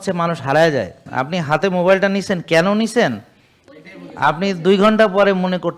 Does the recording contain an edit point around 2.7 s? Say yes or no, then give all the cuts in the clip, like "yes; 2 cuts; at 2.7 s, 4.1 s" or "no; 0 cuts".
no; 1 cut; at 1.1 s